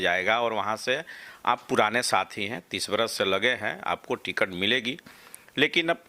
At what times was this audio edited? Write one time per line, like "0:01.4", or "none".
none